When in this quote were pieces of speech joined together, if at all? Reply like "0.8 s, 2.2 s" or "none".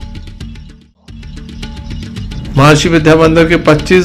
1.4 s